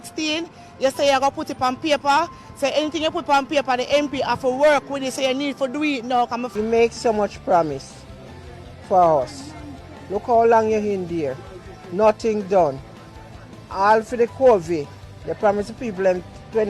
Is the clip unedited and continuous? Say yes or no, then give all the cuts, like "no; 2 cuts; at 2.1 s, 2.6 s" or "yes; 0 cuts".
no; 1 cut; at 6.5 s